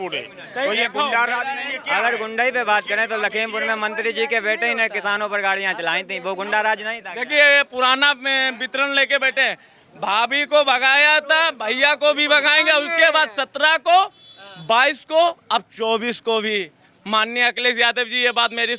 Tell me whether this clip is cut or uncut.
uncut